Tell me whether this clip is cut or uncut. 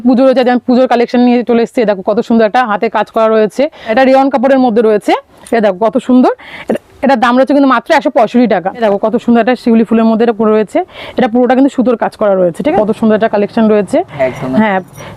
cut